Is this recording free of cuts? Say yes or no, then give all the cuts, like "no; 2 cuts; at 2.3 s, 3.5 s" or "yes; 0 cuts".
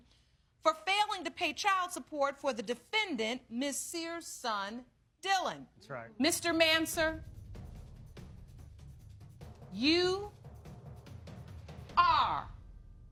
yes; 0 cuts